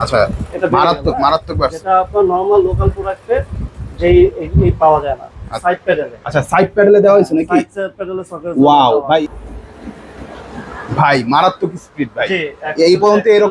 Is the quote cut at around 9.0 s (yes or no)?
yes